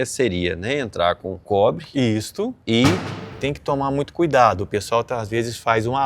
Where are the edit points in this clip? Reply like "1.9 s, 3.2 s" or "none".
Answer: 1.3 s, 2.6 s, 3.3 s